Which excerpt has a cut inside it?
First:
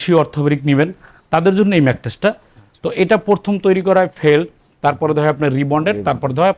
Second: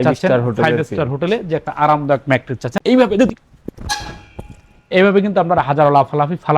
second; 1 cut; at 2.7 s

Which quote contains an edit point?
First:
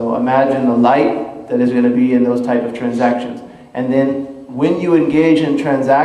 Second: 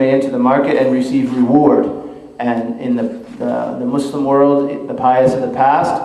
first; 1 cut; at 4.2 s

